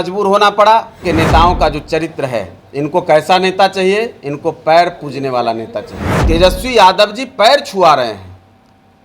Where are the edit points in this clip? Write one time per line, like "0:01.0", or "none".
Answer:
0:00.9
0:06.1